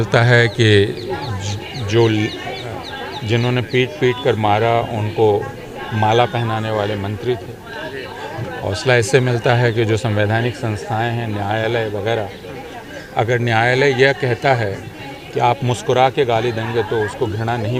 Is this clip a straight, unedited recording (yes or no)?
yes